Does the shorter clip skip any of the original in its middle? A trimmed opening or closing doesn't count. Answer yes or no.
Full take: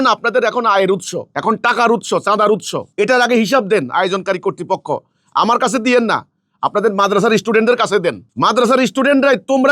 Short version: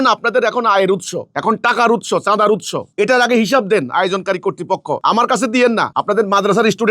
yes